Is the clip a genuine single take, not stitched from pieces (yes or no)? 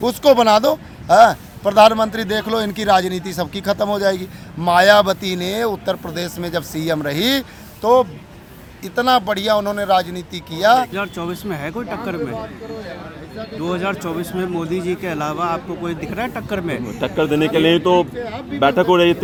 yes